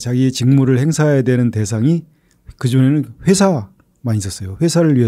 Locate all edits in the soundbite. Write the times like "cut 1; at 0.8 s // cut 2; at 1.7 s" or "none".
none